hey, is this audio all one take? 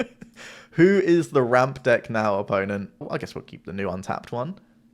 no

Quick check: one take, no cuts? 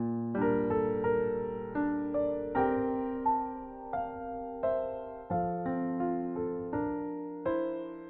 yes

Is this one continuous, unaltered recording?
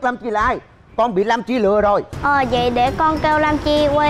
no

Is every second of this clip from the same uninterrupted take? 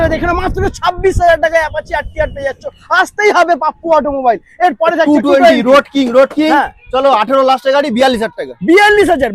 yes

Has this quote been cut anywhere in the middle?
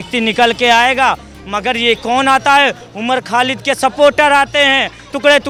no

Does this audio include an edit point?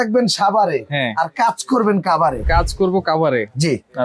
no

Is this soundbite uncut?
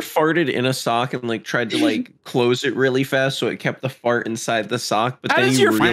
yes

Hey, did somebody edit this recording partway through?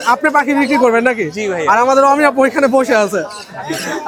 no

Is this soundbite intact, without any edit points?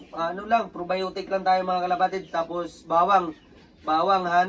yes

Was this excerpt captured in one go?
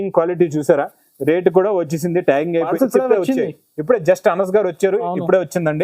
no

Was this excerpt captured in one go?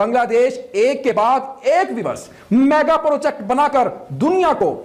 yes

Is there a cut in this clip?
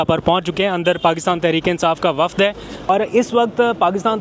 yes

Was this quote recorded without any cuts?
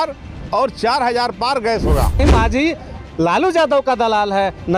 no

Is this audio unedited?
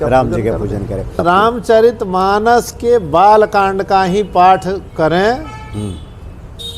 no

